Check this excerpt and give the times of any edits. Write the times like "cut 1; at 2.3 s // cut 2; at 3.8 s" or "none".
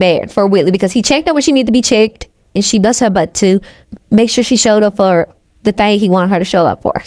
cut 1; at 2.5 s